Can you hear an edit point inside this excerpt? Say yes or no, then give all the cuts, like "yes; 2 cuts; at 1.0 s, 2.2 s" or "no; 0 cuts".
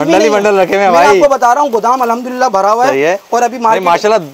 no; 0 cuts